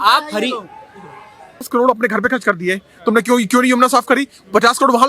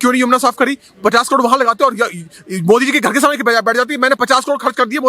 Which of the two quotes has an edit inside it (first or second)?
first